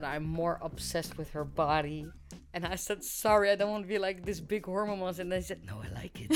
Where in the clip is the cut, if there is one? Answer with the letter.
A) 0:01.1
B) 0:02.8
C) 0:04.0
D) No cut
D